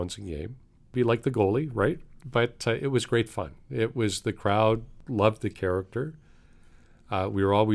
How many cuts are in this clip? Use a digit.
1